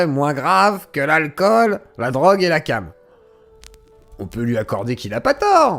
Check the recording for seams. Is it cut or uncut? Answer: uncut